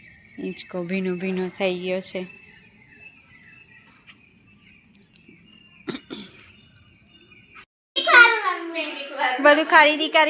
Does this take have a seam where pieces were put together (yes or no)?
yes